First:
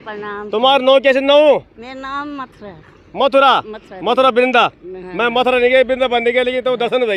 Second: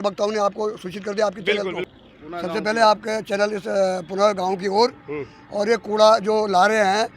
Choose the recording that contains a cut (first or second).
second